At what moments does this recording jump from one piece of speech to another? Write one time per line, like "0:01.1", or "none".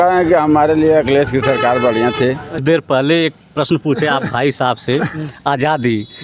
0:02.6